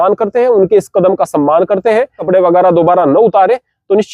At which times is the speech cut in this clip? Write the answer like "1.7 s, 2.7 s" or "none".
2.2 s